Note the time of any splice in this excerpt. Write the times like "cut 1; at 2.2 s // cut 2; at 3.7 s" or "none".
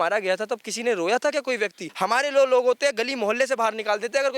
cut 1; at 1.8 s